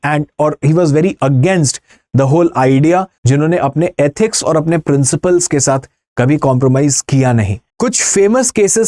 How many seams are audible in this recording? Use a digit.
2